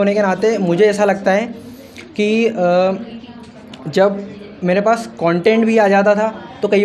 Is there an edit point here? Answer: no; 0 cuts

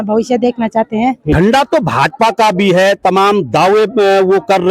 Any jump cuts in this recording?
yes; 1 cut; at 1.3 s

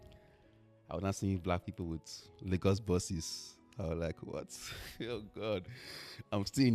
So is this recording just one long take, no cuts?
yes; 0 cuts

